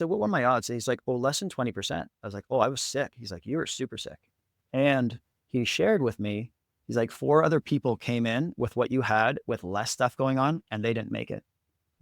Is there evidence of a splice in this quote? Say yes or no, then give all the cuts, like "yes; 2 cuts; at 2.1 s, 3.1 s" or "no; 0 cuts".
no; 0 cuts